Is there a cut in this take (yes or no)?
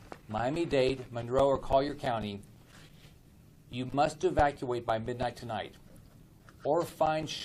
no